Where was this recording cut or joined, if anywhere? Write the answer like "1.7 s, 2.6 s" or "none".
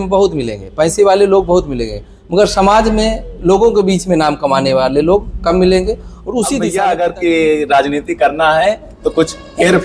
6.6 s

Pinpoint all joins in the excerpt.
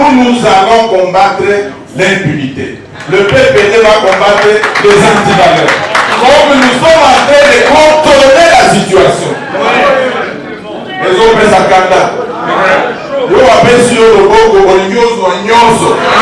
6.1 s

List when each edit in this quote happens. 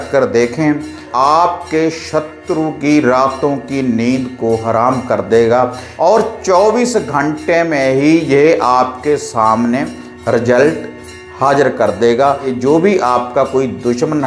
1.1 s, 5.8 s, 12.5 s

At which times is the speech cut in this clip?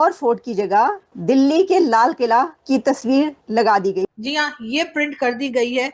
4.1 s

